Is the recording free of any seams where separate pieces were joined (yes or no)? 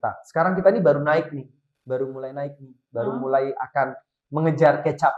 yes